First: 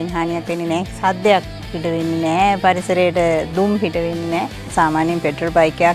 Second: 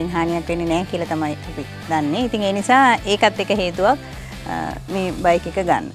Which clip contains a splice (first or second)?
first